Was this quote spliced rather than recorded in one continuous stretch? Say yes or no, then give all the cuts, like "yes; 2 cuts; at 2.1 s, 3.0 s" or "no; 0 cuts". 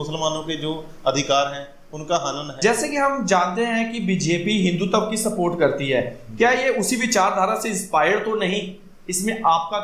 yes; 1 cut; at 2.5 s